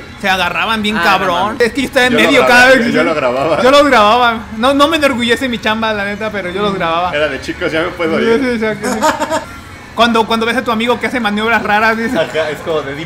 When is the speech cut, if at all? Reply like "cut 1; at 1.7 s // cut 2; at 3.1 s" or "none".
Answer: cut 1; at 1.6 s // cut 2; at 9.5 s